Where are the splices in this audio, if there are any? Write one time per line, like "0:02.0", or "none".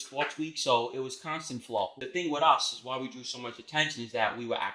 0:02.0

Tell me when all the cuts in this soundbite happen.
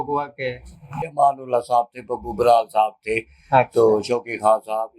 0:01.0

